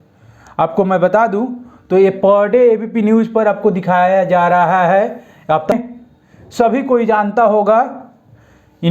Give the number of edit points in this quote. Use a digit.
1